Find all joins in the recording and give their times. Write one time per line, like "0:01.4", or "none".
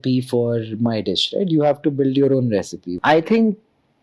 0:02.8